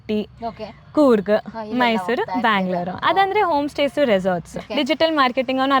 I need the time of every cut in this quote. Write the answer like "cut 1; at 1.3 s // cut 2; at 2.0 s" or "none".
cut 1; at 4.6 s